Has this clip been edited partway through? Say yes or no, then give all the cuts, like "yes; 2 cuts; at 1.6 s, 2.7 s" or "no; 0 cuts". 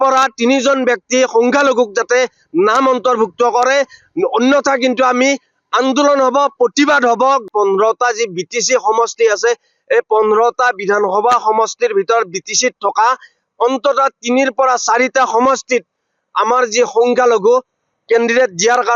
yes; 1 cut; at 7.4 s